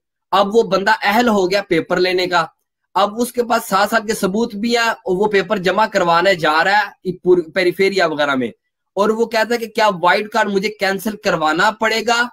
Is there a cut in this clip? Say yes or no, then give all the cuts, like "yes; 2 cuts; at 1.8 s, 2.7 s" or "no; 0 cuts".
no; 0 cuts